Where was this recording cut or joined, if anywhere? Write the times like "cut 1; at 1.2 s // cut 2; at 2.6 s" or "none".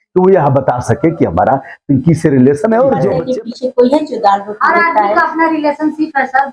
cut 1; at 3.2 s